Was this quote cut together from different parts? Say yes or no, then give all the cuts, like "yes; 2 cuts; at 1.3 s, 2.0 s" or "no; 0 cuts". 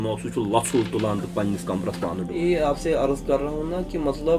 yes; 1 cut; at 2.3 s